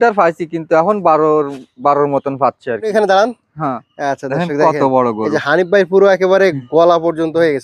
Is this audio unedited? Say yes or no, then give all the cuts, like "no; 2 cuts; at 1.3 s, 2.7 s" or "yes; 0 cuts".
no; 1 cut; at 2.9 s